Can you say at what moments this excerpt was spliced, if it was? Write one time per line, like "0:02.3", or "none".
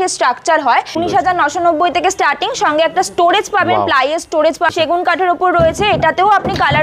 0:00.9
0:04.7